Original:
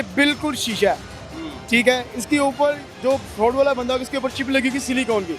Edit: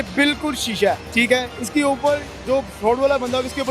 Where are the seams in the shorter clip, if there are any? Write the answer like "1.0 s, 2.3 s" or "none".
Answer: 1.1 s